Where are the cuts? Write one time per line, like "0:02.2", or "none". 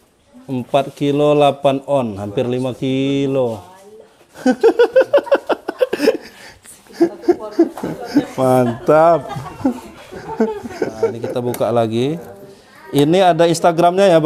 none